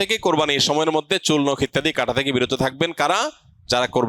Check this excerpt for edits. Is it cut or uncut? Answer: uncut